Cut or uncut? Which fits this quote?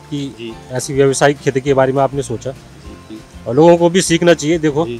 cut